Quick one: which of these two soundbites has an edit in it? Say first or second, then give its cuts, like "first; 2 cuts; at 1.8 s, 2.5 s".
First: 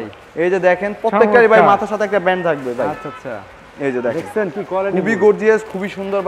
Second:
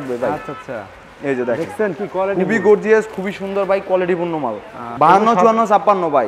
second; 1 cut; at 4.8 s